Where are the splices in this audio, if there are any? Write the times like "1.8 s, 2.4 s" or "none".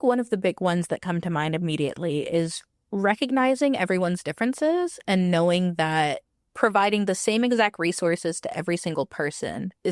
none